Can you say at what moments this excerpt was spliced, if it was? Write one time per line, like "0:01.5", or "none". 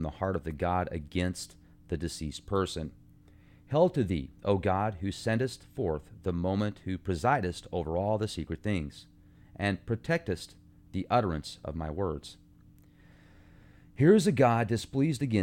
0:04.1